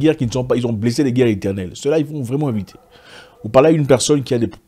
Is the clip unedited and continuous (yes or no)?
yes